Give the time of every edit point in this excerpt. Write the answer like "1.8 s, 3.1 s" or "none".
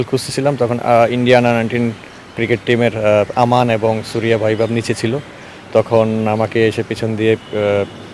none